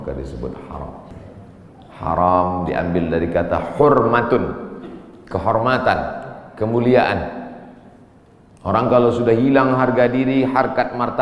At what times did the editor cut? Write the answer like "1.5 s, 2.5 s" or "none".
1.2 s